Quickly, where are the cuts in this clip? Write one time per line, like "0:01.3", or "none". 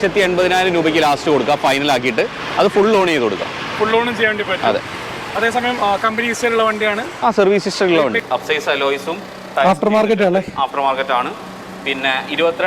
0:08.2